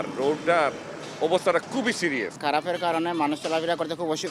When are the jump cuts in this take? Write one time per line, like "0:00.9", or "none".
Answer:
0:02.4